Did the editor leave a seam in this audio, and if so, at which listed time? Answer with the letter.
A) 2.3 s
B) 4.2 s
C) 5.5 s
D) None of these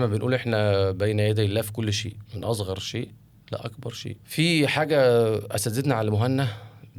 B